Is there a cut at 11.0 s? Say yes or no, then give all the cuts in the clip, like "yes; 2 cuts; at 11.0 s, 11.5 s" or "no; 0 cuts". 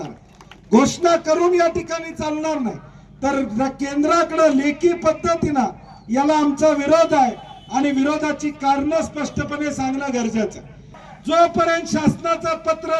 yes; 1 cut; at 11.0 s